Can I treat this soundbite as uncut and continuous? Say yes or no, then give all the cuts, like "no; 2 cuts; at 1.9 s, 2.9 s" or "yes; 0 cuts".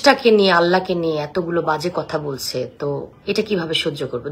no; 1 cut; at 3.1 s